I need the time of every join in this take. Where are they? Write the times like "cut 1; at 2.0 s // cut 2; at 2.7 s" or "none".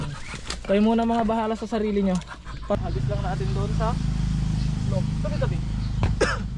cut 1; at 2.8 s